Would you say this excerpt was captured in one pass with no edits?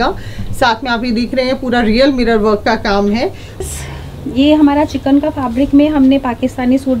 no; 1 cut; at 3.6 s

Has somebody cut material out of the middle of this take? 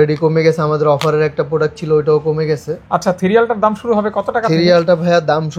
no; 0 cuts

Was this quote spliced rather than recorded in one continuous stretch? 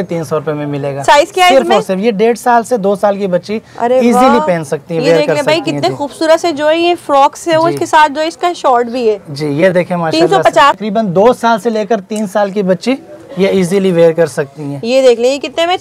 yes; 1 cut; at 10.8 s

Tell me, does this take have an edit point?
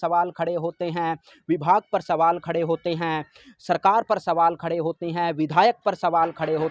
no; 0 cuts

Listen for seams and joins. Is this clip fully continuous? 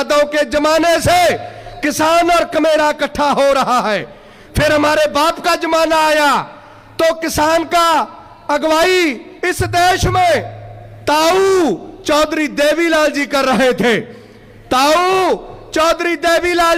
yes; 0 cuts

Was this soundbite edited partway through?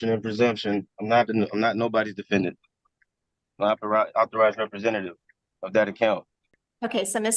no; 0 cuts

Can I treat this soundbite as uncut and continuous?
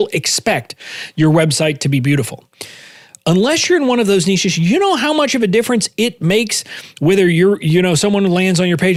yes; 0 cuts

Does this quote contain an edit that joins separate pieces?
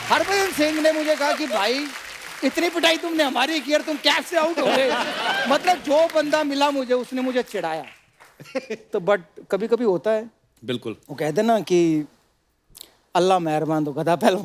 no; 0 cuts

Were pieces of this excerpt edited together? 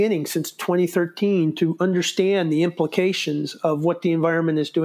no; 0 cuts

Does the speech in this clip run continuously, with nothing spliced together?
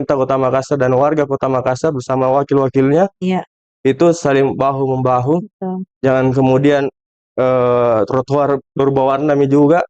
yes; 0 cuts

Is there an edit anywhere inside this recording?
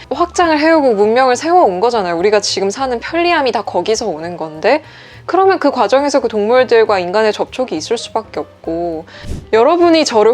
yes; 1 cut; at 9.4 s

